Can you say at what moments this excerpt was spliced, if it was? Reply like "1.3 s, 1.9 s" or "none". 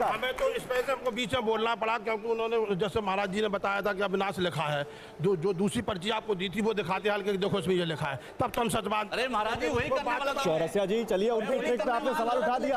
none